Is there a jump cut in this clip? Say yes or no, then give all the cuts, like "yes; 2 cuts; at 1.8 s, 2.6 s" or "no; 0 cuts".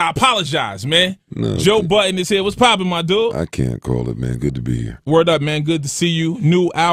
yes; 1 cut; at 1.1 s